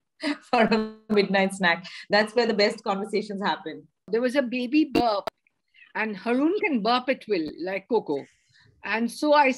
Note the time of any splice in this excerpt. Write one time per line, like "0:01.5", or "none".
0:04.1